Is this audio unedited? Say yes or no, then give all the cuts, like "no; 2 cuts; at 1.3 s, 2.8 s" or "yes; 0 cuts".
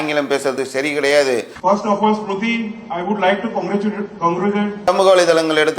no; 1 cut; at 4.9 s